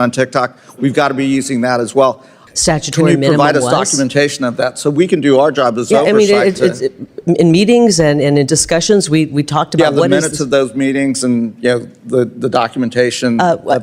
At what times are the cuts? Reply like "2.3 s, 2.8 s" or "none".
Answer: 2.4 s